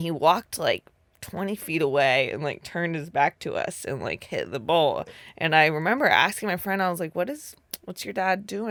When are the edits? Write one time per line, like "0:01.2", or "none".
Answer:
none